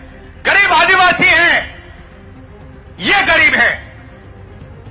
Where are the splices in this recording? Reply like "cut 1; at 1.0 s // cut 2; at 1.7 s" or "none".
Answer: cut 1; at 3.9 s